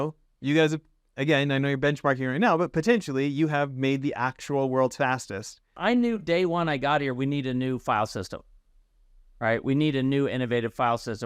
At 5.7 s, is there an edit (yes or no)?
yes